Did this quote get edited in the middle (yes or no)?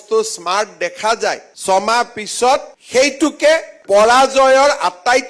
yes